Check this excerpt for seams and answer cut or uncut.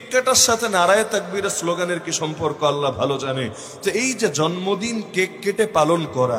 uncut